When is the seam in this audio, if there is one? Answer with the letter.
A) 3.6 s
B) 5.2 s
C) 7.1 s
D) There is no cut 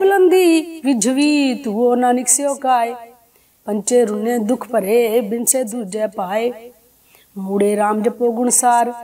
C